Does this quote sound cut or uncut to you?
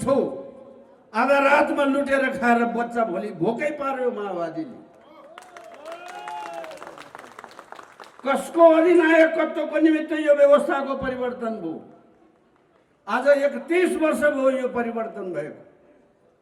uncut